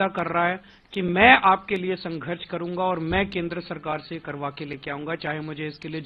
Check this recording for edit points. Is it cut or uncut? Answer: uncut